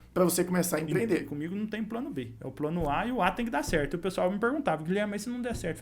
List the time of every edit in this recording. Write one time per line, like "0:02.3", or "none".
0:01.3
0:02.4